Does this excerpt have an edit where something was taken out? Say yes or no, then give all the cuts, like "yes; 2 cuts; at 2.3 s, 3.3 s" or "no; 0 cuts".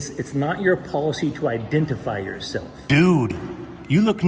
yes; 1 cut; at 2.7 s